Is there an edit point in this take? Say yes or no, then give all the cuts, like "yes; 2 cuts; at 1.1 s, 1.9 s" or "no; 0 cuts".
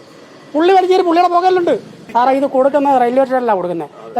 yes; 1 cut; at 2.0 s